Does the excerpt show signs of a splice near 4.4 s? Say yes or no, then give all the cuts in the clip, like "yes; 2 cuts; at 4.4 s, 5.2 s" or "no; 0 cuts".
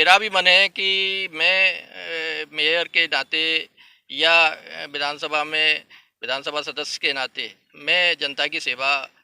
no; 0 cuts